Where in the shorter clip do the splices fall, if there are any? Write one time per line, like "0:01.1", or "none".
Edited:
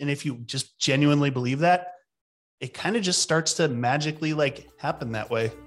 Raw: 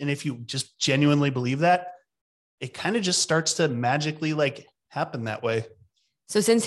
0:04.7